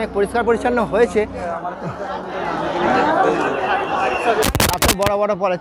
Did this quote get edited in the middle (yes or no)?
yes